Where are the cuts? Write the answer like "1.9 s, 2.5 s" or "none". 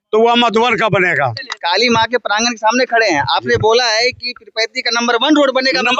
1.6 s